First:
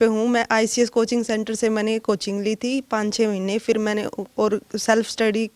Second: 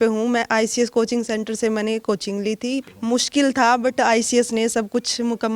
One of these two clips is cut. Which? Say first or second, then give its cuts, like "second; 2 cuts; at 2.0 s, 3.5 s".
second; 1 cut; at 2.9 s